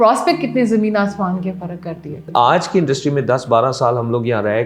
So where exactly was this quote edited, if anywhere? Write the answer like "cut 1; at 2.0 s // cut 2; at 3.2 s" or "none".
cut 1; at 2.3 s